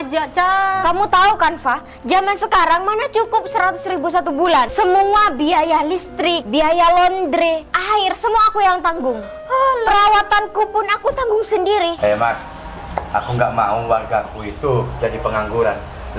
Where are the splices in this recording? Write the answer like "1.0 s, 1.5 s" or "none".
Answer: 4.7 s, 6.4 s, 7.7 s, 12.0 s